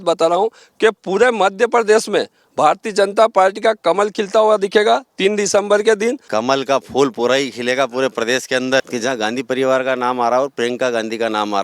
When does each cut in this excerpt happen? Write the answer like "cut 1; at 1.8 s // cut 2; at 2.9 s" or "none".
cut 1; at 6.2 s // cut 2; at 8.8 s